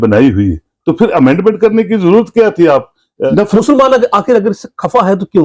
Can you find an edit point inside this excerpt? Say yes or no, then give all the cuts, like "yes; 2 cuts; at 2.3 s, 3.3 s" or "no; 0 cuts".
yes; 1 cut; at 3.2 s